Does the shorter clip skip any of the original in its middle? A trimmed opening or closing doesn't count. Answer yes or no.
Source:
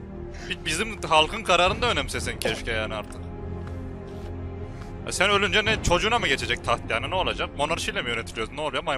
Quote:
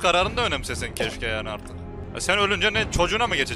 yes